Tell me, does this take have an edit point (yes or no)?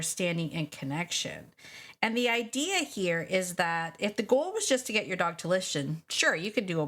no